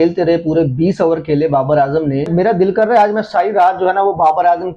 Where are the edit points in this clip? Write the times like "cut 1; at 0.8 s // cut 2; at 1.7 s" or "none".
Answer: cut 1; at 2.3 s